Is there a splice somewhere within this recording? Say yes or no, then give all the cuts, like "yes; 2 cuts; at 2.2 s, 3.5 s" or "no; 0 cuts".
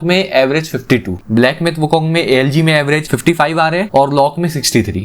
yes; 1 cut; at 1.2 s